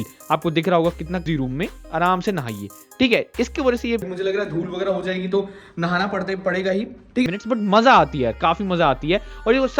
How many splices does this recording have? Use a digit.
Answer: 3